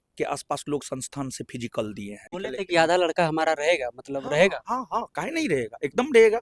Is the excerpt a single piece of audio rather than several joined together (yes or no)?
no